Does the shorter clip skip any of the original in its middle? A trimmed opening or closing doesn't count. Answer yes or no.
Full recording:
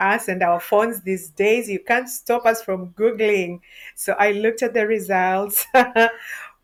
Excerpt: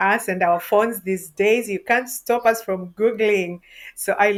no